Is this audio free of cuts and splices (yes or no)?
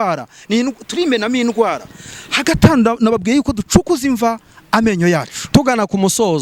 yes